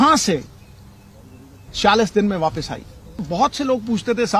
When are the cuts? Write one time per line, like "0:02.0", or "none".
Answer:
0:03.2